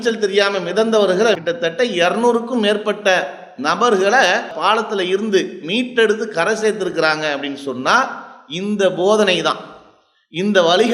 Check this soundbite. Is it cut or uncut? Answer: cut